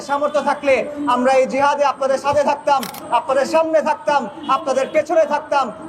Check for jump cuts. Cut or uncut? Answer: uncut